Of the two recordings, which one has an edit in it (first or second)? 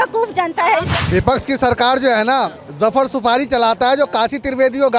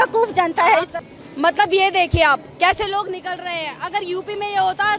first